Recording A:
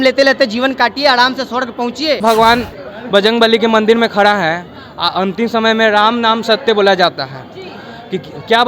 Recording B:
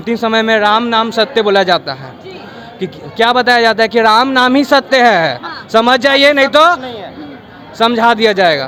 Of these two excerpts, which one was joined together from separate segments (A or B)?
A